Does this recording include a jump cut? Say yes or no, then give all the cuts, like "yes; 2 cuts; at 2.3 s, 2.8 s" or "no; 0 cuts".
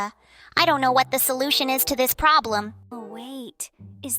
yes; 1 cut; at 2.8 s